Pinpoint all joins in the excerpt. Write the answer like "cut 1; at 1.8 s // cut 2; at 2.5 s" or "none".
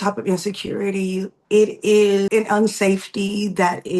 cut 1; at 1.4 s // cut 2; at 2.3 s